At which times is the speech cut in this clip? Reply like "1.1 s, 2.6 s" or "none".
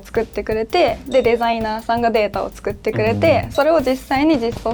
none

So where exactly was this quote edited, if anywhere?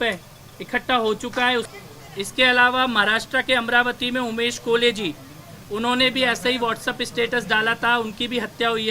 1.7 s

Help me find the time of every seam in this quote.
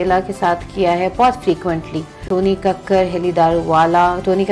2.2 s

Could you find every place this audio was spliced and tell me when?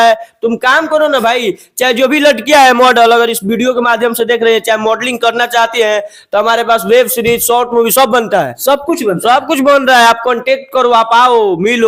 none

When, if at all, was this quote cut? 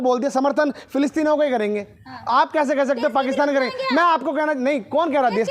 none

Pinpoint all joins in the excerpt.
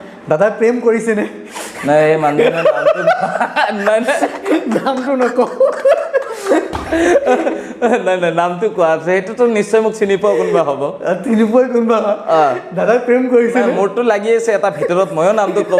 none

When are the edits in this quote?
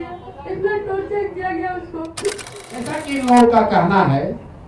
3.0 s

